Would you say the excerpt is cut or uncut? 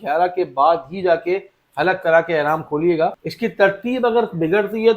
cut